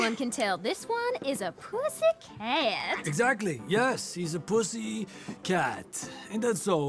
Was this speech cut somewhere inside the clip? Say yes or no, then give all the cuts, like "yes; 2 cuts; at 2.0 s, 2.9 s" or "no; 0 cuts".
no; 0 cuts